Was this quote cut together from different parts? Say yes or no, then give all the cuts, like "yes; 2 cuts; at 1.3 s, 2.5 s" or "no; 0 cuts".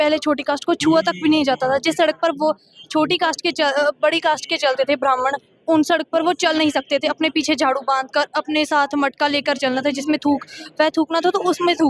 no; 0 cuts